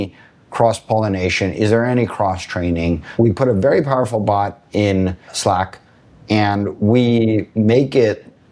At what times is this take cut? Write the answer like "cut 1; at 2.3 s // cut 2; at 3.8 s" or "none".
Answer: cut 1; at 3.0 s // cut 2; at 5.3 s // cut 3; at 7.5 s